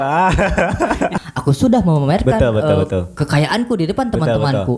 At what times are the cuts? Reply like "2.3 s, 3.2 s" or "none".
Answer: 1.2 s

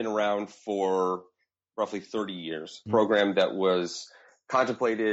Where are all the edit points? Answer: 2.8 s

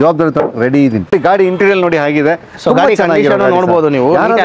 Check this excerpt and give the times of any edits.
1.1 s

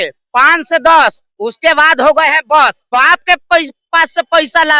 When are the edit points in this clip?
2.8 s

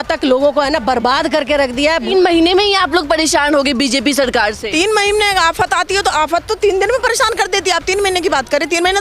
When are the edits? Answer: 2.1 s

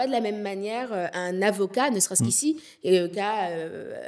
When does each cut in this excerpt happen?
1.1 s, 3.1 s

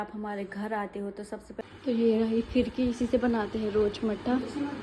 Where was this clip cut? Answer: 1.6 s

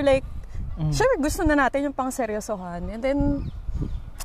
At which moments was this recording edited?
none

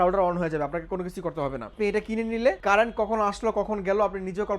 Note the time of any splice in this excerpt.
1.6 s, 2.6 s

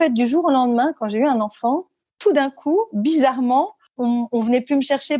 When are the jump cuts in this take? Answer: 3.8 s

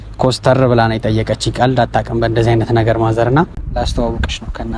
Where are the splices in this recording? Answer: 3.6 s

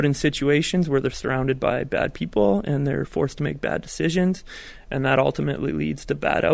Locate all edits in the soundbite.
none

